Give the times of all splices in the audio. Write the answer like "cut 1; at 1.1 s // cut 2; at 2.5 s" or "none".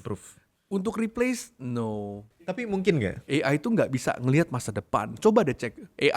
cut 1; at 2.5 s // cut 2; at 3.2 s